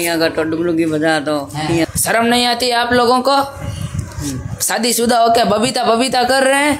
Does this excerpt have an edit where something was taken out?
yes; 1 cut; at 1.9 s

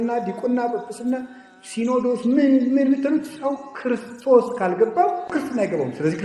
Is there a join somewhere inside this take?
yes; 1 cut; at 5.3 s

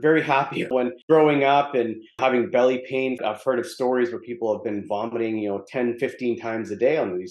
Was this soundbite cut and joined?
yes; 2 cuts; at 0.8 s, 2.2 s

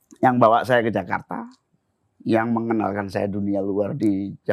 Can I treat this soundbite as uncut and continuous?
yes; 0 cuts

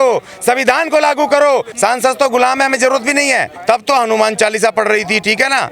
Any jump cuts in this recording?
yes; 2 cuts; at 1.7 s, 3.5 s

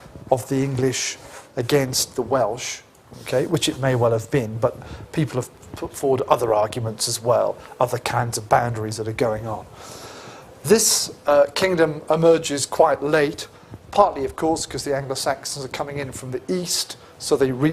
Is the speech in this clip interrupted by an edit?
yes; 1 cut; at 1.0 s

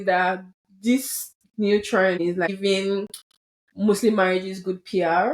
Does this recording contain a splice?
yes; 1 cut; at 2.2 s

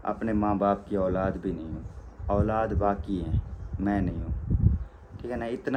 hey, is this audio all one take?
yes; 0 cuts

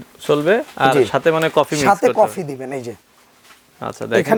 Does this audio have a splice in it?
no; 0 cuts

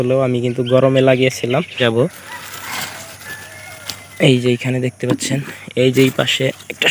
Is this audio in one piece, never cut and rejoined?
no; 1 cut; at 1.8 s

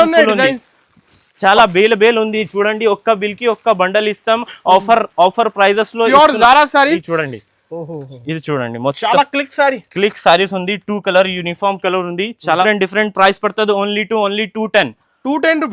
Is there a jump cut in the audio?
yes; 2 cuts; at 7.0 s, 12.6 s

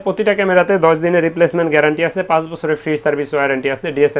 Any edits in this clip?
no; 0 cuts

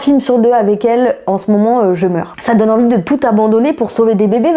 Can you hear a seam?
yes; 1 cut; at 2.3 s

